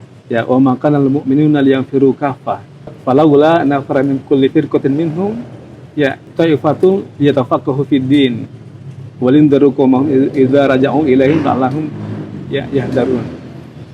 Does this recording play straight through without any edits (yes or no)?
no